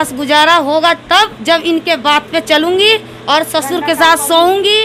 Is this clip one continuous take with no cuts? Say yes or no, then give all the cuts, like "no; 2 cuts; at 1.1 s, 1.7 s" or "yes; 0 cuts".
yes; 0 cuts